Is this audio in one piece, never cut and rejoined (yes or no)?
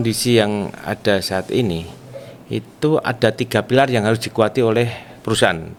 yes